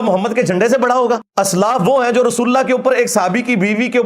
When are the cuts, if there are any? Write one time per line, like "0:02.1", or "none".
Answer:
0:01.3